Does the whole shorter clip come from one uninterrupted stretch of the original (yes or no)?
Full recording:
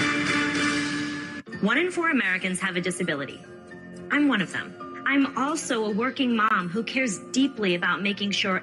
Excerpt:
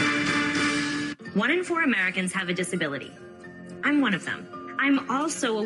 no